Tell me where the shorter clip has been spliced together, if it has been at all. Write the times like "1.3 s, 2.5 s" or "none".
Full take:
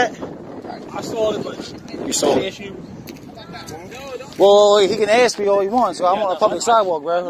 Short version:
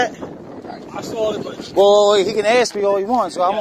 1.7 s